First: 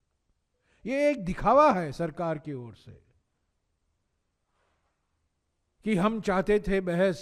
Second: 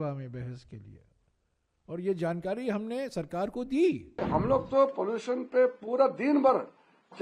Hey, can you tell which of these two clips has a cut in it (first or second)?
second